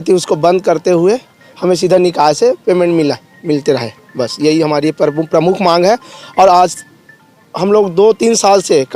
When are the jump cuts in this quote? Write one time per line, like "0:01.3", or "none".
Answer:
none